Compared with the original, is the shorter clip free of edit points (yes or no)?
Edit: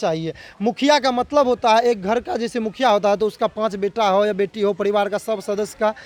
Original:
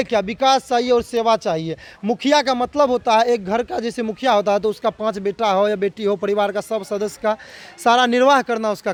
yes